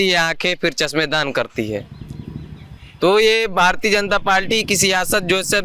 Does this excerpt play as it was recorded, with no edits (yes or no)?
yes